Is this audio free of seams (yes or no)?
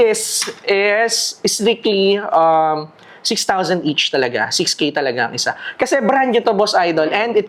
yes